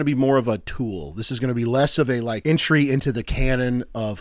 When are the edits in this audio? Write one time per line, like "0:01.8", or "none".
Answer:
0:02.4